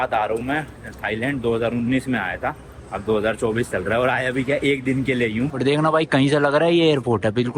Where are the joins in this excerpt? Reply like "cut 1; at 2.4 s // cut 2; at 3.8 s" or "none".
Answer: cut 1; at 5.5 s